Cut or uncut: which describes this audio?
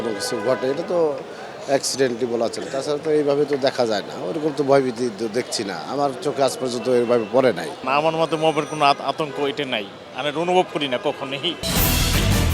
cut